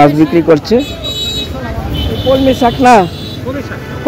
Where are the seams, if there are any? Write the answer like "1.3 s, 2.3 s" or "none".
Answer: 2.2 s